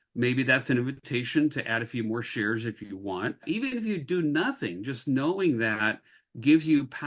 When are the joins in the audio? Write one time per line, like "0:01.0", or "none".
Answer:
0:03.4

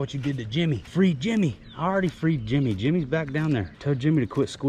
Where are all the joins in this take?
0:00.8
0:03.7

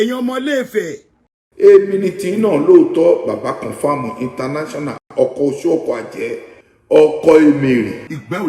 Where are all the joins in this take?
0:01.4

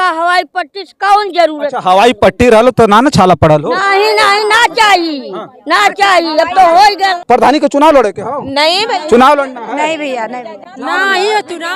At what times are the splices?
0:07.2

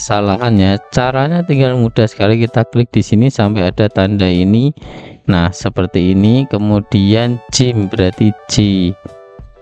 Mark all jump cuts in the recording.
none

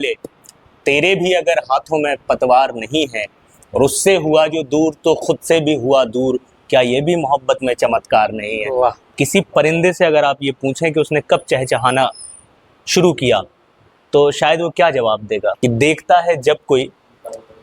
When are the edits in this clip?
0:09.0
0:15.6

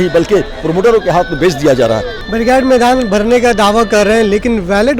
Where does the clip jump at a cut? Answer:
0:02.1

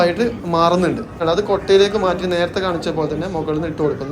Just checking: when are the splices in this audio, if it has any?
0:01.2

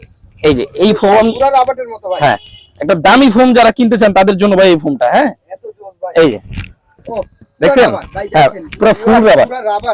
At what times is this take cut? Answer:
none

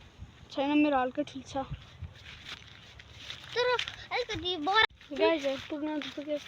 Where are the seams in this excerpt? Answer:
0:04.8

